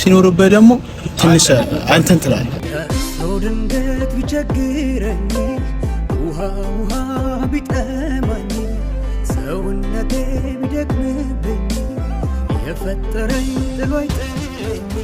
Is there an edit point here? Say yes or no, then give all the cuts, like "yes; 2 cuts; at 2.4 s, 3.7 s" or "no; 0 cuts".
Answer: yes; 1 cut; at 2.5 s